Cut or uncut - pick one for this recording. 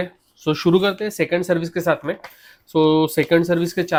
uncut